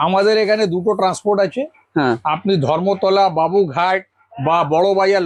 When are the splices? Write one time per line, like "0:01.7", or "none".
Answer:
none

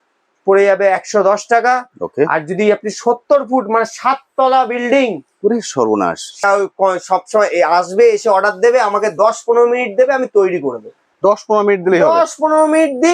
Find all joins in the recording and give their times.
0:06.4

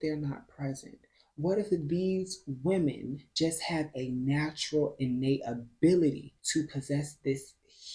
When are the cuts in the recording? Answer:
none

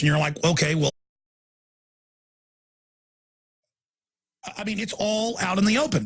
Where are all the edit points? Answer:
none

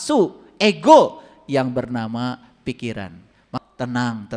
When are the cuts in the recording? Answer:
0:03.5

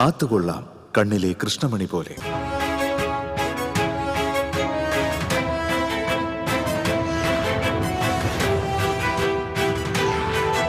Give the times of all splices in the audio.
0:02.1

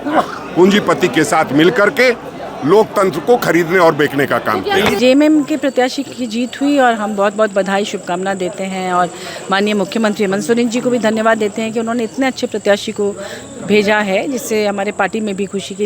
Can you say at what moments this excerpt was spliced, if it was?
0:05.0

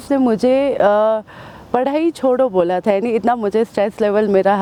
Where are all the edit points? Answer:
none

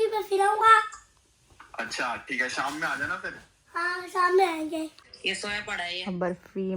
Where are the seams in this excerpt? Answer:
0:05.1

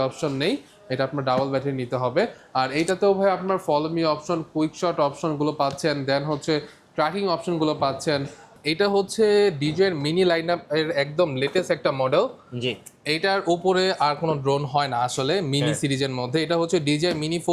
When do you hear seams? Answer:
0:08.6

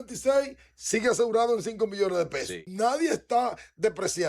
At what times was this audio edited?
0:02.7

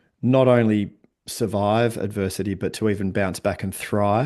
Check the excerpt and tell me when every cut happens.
none

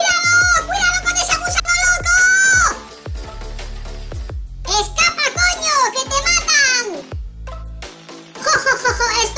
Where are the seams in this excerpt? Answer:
0:02.7
0:04.7
0:07.0
0:08.4

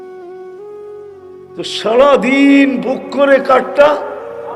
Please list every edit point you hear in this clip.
0:01.1

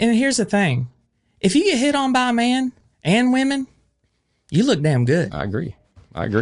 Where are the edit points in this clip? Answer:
none

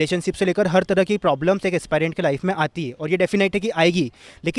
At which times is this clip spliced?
none

